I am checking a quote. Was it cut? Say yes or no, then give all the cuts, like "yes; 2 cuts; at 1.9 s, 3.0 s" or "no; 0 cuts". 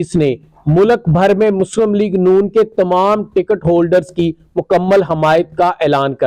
no; 0 cuts